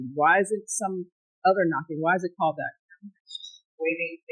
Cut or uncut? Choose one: cut